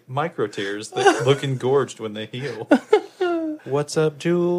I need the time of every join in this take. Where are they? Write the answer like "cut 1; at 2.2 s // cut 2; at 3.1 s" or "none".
cut 1; at 3.6 s